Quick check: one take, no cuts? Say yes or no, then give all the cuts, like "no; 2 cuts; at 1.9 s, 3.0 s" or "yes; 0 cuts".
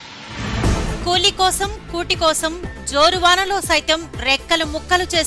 no; 1 cut; at 1.0 s